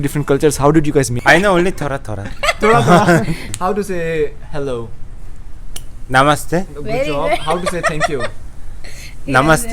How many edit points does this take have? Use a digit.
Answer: 2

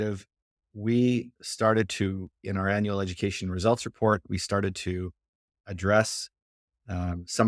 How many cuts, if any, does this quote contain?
1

